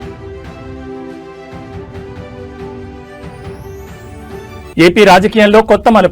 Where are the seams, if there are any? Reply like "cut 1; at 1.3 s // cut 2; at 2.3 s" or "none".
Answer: cut 1; at 4.7 s

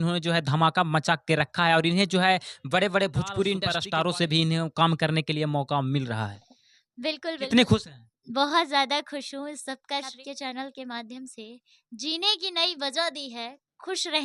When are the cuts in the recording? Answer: cut 1; at 3.7 s // cut 2; at 10.2 s

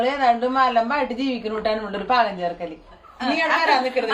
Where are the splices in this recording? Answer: cut 1; at 3.1 s

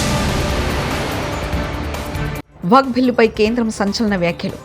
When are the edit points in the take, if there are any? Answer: cut 1; at 2.1 s

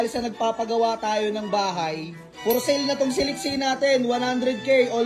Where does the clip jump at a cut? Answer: none

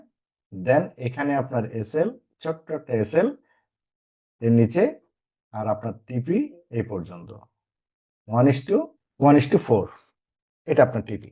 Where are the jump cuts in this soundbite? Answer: cut 1; at 9.0 s

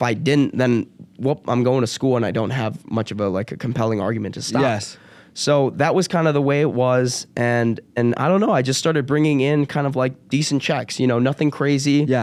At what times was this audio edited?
none

